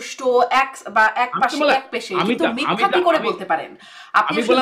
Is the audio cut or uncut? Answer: uncut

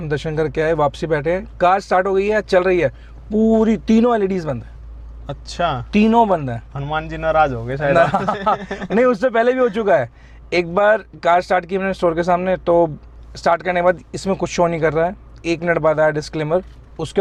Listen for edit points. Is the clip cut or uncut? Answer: uncut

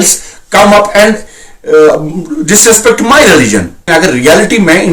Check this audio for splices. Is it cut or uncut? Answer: cut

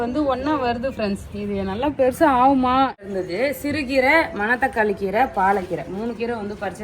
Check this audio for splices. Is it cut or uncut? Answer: cut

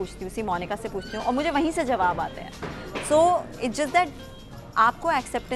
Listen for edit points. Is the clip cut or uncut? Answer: uncut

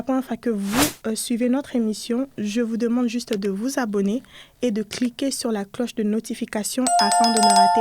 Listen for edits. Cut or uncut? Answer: cut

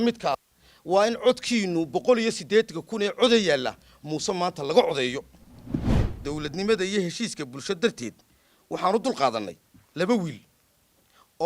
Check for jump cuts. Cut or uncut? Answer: cut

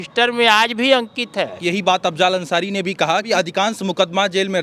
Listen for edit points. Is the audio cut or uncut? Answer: cut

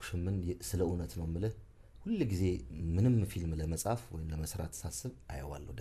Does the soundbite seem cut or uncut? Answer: uncut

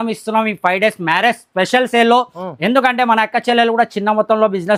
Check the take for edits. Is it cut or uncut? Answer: uncut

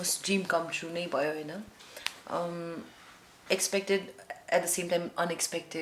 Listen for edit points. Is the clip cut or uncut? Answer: uncut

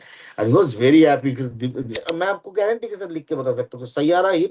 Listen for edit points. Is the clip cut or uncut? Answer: cut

